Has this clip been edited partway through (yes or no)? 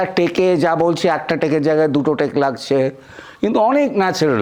no